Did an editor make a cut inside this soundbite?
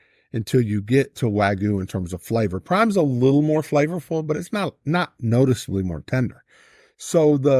no; 0 cuts

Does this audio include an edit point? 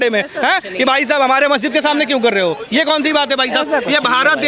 no; 0 cuts

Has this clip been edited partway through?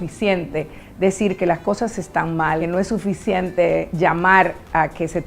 yes; 2 cuts; at 2.6 s, 3.9 s

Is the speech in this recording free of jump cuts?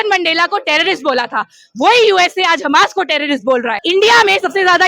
no; 1 cut; at 3.8 s

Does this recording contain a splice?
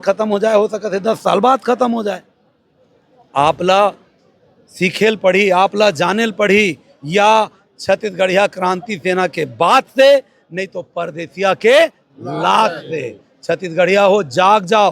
no; 0 cuts

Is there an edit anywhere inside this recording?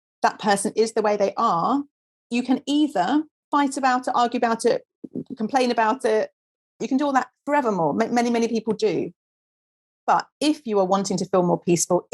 yes; 3 cuts; at 2.2 s, 3.4 s, 6.8 s

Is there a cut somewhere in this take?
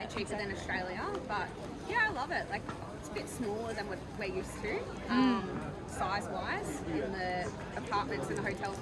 no; 0 cuts

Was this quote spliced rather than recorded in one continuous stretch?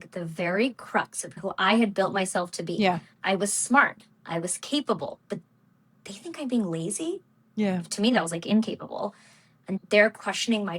yes; 1 cut; at 1.3 s

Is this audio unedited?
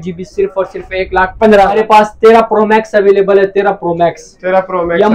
no; 1 cut; at 1.7 s

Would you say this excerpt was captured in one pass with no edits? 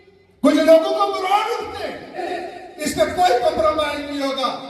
no; 1 cut; at 2.3 s

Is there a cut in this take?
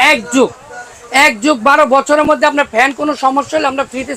no; 0 cuts

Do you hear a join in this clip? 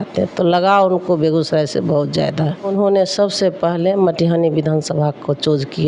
yes; 1 cut; at 2.7 s

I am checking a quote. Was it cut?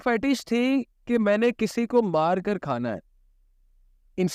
no; 0 cuts

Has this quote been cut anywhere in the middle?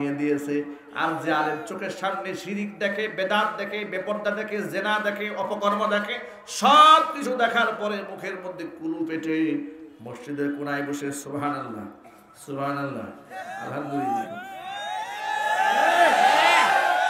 no; 0 cuts

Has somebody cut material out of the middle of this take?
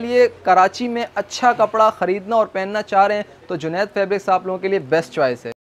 no; 0 cuts

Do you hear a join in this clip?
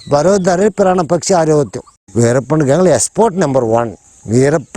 yes; 1 cut; at 2.0 s

